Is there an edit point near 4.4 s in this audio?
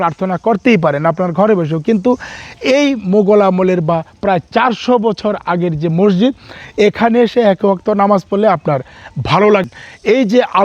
no; 1 cut; at 9.7 s

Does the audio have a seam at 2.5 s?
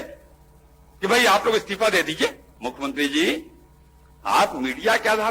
yes; 1 cut; at 2.5 s

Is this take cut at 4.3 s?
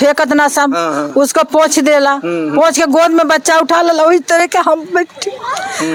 no; 0 cuts

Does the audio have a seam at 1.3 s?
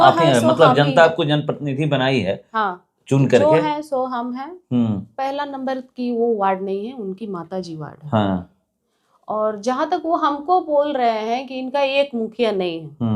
no; 1 cut; at 5.1 s

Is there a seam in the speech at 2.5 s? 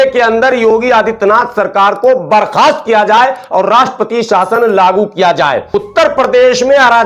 no; 1 cut; at 5.7 s

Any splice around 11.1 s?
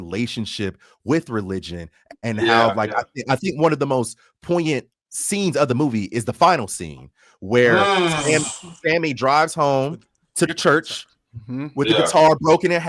no; 0 cuts

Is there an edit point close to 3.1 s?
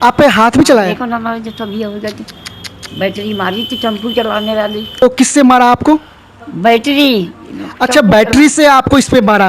no; 1 cut; at 5.0 s

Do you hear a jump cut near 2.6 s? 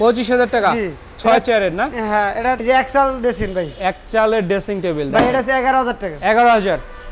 yes; 1 cut; at 2.6 s

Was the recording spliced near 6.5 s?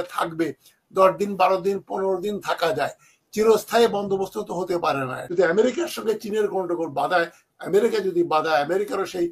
no; 1 cut; at 5.2 s

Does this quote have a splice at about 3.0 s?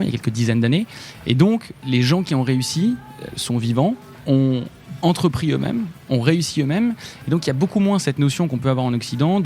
no; 2 cuts; at 1.7 s, 4.3 s

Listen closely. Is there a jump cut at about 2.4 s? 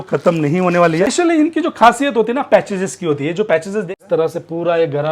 no; 2 cuts; at 1.1 s, 3.9 s

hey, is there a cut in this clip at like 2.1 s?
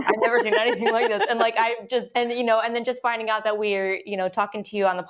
yes; 1 cut; at 2.1 s

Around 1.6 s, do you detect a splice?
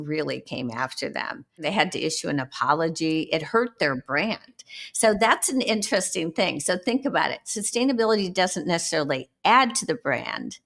yes; 1 cut; at 1.6 s

